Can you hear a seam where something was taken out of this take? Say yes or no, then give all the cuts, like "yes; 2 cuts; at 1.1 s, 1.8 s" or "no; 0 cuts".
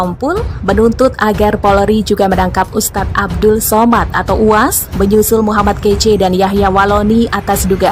no; 0 cuts